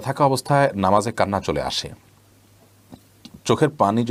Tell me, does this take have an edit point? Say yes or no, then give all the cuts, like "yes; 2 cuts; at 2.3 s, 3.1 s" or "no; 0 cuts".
no; 0 cuts